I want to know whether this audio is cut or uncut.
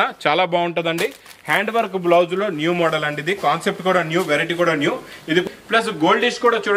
cut